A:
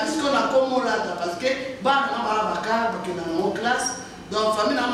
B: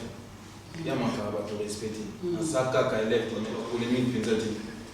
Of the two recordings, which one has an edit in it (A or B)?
B